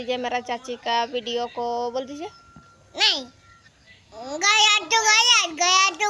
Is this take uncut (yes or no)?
no